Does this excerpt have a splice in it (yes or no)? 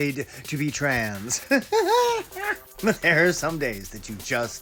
no